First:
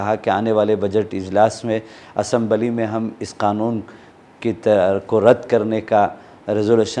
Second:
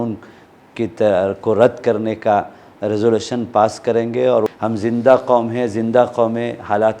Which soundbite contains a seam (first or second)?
second